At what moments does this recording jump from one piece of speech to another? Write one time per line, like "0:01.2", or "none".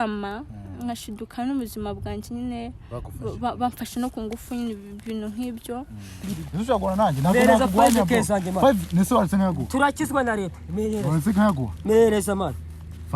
0:06.4